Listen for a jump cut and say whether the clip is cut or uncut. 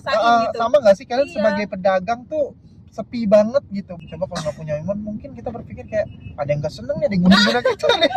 cut